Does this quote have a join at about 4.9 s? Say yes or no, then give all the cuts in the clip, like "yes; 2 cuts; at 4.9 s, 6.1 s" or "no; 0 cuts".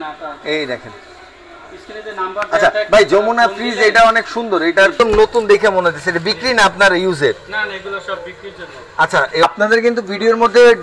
yes; 2 cuts; at 4.9 s, 9.4 s